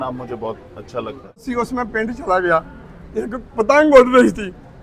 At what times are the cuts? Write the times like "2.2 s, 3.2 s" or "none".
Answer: 1.4 s

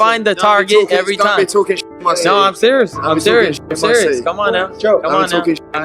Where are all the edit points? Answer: 4.9 s

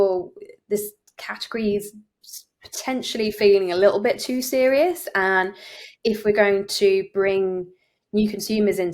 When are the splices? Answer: none

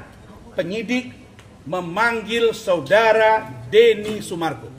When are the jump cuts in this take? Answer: none

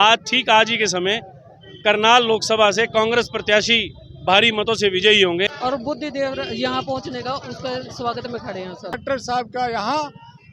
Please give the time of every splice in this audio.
5.5 s, 9.0 s

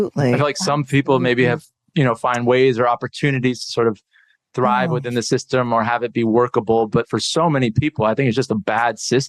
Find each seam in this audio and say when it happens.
none

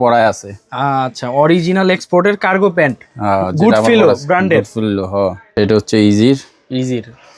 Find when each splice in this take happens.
5.4 s

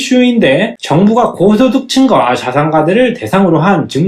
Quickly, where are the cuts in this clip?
none

